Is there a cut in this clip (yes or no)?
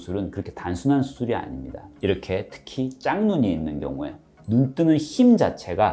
no